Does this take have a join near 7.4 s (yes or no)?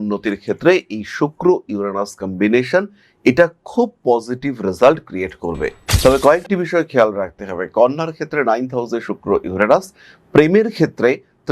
no